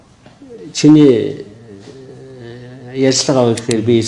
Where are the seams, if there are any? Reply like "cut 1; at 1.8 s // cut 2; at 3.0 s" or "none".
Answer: none